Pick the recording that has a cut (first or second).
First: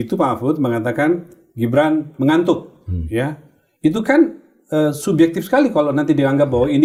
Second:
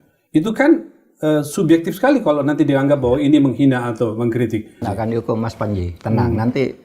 second